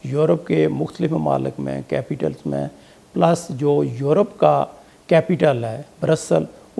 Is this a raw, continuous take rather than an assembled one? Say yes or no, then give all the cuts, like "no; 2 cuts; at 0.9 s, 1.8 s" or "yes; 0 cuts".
yes; 0 cuts